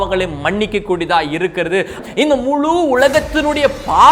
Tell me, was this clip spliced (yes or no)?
yes